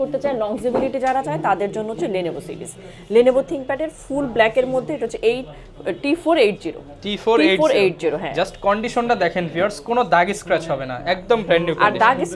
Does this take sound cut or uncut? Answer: uncut